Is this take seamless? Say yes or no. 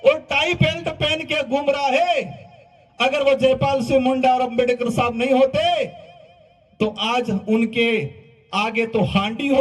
yes